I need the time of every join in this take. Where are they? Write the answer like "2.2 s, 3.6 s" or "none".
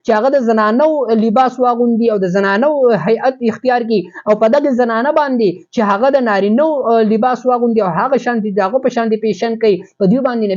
none